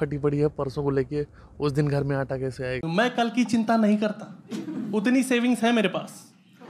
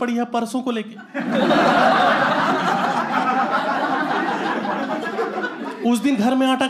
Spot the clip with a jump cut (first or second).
first